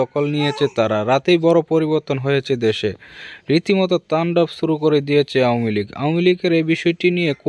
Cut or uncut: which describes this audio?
uncut